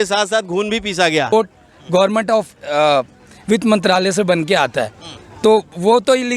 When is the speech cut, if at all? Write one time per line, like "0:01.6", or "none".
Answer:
0:01.3